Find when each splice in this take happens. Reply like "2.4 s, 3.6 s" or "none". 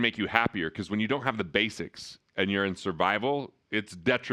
none